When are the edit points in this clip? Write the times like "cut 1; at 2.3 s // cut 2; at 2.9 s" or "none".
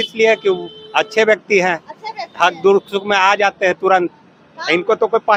none